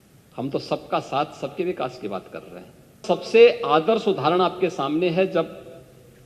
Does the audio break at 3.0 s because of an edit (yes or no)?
yes